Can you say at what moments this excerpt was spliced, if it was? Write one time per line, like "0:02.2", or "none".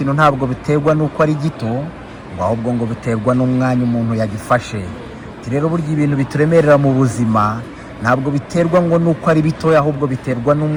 none